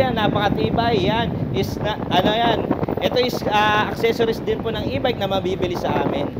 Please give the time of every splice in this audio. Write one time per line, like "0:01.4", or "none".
none

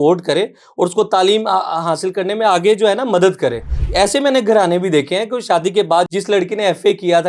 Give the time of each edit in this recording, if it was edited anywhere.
0:06.1

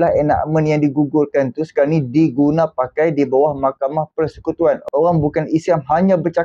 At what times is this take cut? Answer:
0:04.8

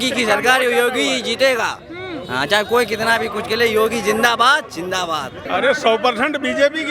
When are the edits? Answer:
0:05.3

